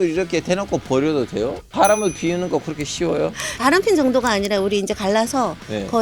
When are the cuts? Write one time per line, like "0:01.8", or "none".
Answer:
0:01.7

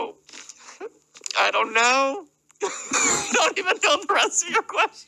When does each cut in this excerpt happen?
none

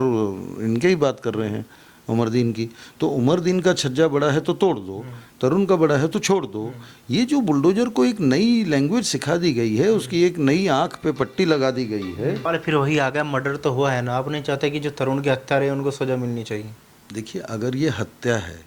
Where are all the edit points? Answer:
0:12.4

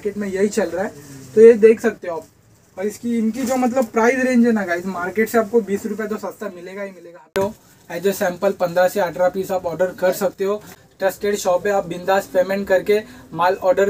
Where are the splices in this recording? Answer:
0:07.4
0:10.7

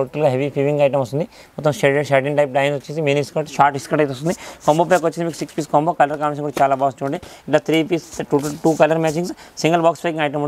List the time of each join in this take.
none

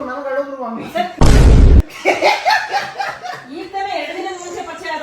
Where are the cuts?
none

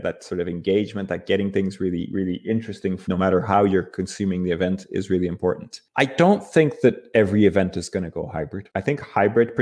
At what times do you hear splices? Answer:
none

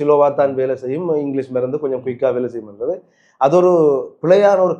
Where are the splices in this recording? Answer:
none

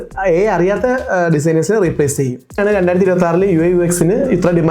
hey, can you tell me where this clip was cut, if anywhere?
0:02.6

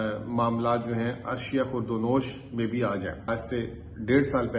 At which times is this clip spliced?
0:03.3

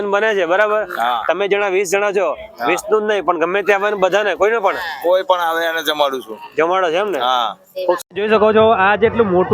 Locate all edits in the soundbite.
0:08.0

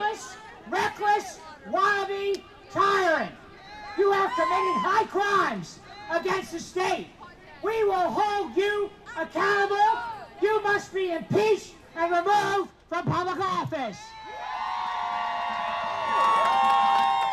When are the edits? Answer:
none

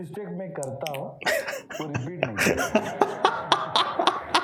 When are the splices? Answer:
none

